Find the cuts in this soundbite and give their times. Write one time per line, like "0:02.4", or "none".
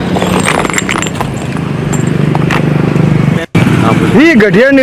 0:03.4